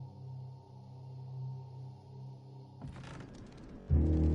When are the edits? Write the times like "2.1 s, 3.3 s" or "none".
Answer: 3.2 s